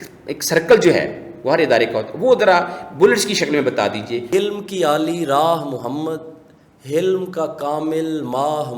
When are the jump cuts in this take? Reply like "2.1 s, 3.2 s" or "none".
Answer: 4.3 s